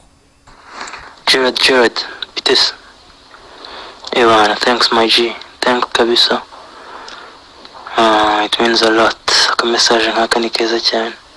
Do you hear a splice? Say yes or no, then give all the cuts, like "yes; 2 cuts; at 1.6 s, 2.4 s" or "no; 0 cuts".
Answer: no; 0 cuts